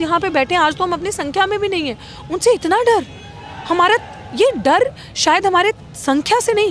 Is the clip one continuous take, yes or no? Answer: yes